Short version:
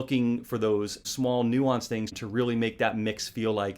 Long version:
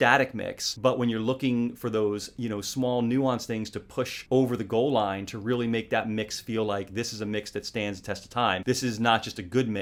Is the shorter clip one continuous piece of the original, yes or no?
no